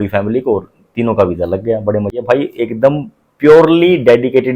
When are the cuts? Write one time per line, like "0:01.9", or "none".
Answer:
0:02.1